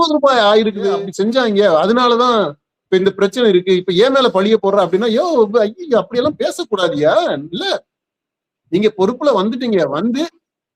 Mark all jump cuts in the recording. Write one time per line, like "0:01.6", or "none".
0:00.9